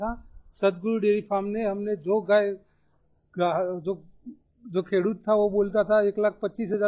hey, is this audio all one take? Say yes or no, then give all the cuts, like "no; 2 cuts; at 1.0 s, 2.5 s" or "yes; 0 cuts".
yes; 0 cuts